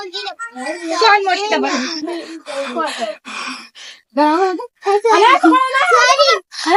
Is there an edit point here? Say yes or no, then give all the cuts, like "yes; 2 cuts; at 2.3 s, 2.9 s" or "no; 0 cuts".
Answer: no; 0 cuts